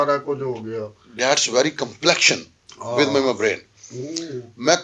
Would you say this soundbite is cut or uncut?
uncut